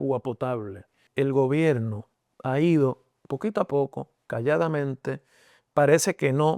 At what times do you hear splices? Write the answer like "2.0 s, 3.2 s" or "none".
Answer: 1.0 s